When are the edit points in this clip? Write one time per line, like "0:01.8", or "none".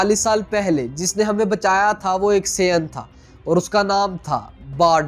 none